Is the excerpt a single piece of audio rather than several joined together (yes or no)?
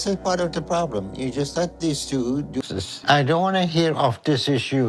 no